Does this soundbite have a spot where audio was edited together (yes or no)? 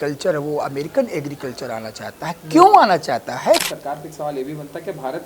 yes